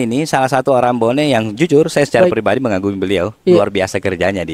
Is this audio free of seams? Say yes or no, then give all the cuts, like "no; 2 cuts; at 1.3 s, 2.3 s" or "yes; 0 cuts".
yes; 0 cuts